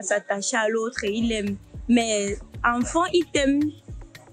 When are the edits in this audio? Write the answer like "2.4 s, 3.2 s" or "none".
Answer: none